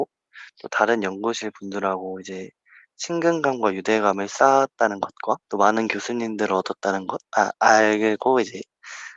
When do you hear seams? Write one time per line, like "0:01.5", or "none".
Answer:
0:05.5